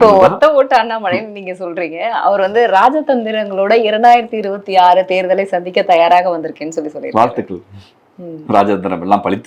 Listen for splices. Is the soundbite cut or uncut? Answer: uncut